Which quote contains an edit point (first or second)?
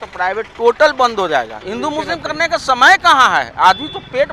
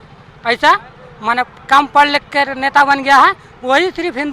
first